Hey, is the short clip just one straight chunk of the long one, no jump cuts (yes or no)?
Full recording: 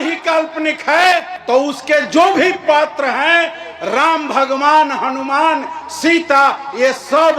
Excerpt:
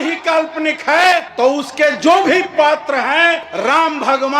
no